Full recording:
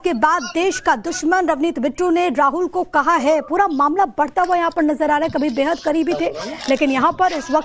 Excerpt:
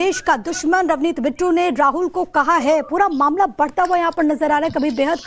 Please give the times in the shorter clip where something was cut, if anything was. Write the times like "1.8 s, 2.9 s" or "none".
none